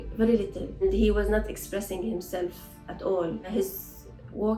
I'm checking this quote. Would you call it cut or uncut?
cut